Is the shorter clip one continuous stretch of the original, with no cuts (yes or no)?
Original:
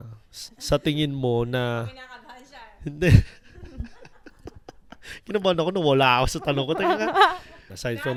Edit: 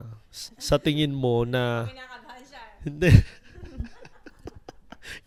yes